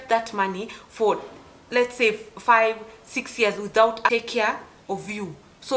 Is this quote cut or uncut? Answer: cut